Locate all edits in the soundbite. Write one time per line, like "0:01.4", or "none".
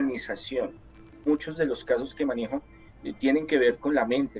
0:01.1